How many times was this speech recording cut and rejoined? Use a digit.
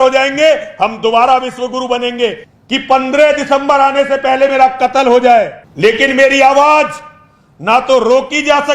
2